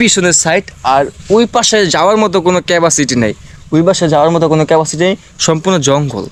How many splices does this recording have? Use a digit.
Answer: 0